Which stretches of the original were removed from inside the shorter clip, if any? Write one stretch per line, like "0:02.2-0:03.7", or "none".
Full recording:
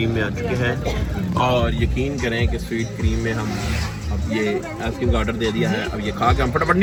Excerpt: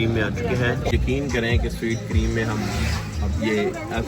0:00.9-0:01.8